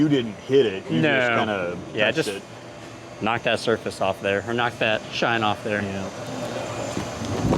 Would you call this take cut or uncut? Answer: cut